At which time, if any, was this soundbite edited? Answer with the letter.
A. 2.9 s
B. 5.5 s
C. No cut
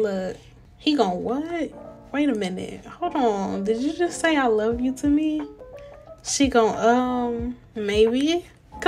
C